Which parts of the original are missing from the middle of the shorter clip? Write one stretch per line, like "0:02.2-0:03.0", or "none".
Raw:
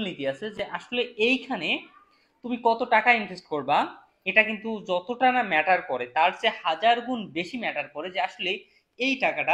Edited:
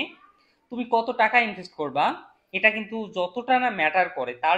none